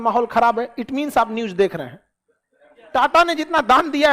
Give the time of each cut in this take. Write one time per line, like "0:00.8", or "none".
0:02.8